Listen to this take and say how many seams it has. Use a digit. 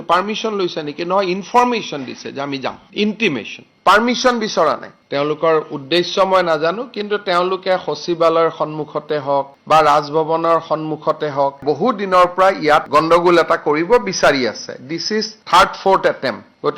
3